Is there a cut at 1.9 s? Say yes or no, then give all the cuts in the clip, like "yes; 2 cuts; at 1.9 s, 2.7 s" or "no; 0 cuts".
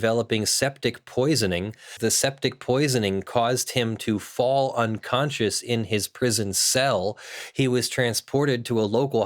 yes; 1 cut; at 1.9 s